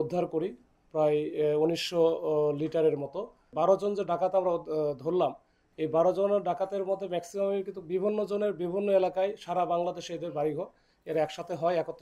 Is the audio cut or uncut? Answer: cut